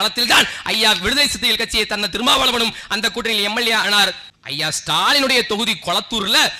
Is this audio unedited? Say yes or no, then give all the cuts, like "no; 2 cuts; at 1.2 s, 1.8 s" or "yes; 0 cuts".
no; 1 cut; at 4.3 s